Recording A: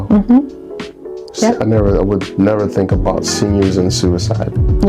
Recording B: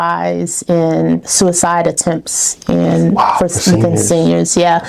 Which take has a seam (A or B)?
B